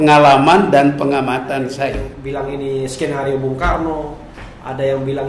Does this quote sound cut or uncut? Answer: cut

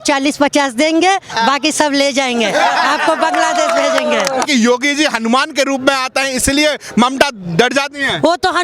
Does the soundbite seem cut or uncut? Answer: cut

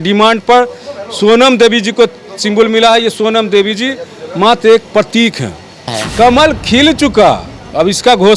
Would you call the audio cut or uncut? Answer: cut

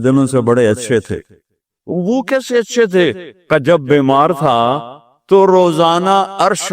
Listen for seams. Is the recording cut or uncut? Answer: cut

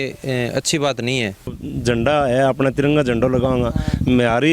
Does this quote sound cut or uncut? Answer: cut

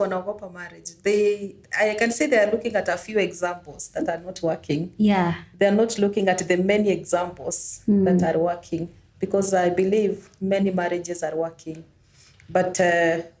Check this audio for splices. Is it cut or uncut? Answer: uncut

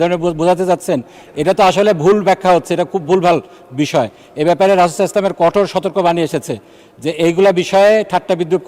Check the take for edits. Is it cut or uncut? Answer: uncut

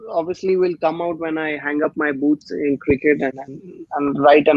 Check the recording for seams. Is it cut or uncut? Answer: uncut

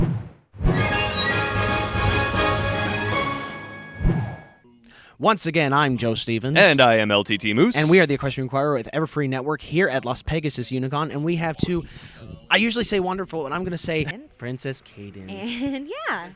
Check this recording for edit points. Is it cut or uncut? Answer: uncut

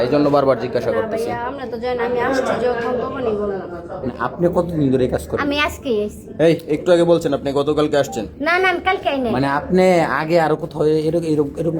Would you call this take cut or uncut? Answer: cut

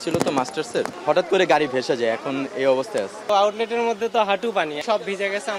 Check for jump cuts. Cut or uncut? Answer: cut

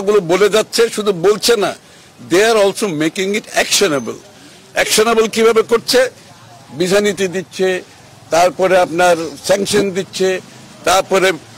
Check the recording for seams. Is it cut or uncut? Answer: uncut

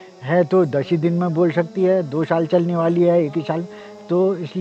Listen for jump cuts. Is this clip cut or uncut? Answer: uncut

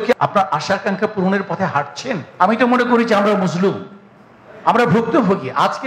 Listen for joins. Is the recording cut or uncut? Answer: cut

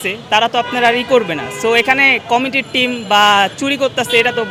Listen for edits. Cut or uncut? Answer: uncut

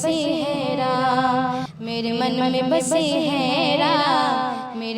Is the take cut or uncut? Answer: uncut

